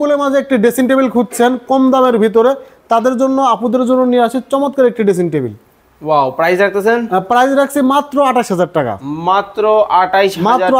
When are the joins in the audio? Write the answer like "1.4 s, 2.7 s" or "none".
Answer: none